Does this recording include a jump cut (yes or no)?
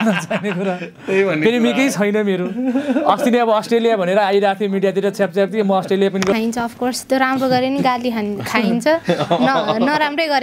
yes